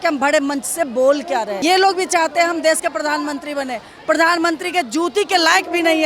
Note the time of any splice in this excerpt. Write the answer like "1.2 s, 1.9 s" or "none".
1.6 s